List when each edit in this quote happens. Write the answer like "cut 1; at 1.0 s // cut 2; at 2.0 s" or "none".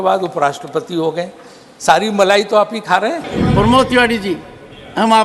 cut 1; at 3.3 s